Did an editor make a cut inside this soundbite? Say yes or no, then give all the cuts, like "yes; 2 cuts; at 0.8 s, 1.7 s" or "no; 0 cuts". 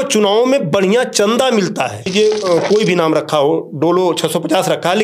yes; 1 cut; at 2.1 s